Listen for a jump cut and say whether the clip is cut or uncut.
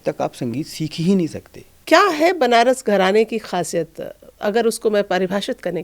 cut